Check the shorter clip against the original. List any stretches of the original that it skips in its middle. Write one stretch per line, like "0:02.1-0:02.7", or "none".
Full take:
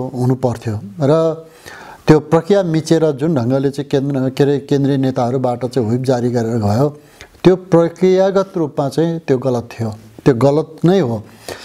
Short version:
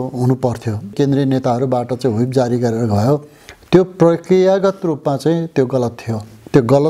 0:00.9-0:04.6